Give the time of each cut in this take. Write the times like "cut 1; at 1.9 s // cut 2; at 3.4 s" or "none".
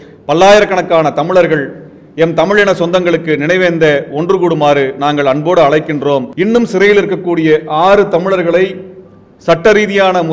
cut 1; at 6.3 s